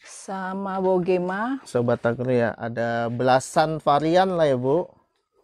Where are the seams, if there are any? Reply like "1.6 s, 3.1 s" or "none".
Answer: none